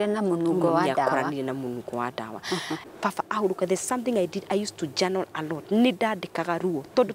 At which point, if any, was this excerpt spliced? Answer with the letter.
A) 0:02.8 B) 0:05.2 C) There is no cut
A